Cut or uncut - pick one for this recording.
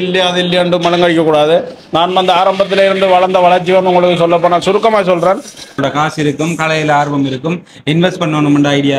cut